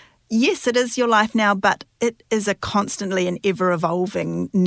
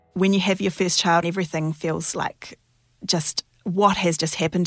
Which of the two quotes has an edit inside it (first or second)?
second